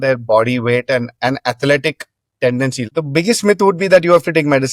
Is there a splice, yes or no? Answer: yes